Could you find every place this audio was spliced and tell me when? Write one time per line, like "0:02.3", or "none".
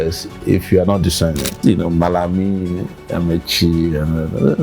0:01.5